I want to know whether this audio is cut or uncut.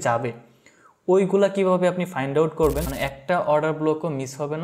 cut